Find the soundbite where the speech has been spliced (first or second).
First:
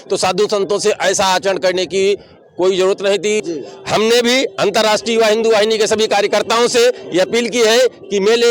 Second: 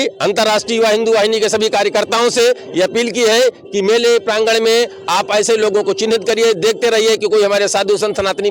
first